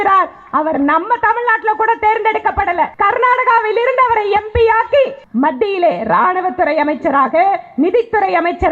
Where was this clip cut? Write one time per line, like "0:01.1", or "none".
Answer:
0:02.9
0:05.2